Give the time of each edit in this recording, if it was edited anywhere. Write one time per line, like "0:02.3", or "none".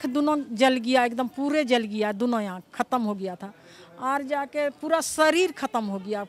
none